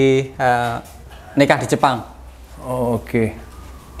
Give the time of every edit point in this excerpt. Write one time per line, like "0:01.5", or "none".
none